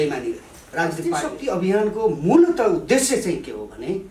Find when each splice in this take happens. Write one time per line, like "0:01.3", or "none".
0:01.2